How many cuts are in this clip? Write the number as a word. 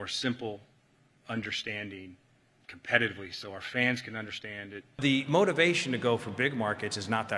one